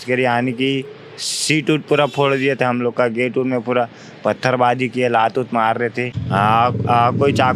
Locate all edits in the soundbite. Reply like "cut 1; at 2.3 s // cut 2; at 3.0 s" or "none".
cut 1; at 6.1 s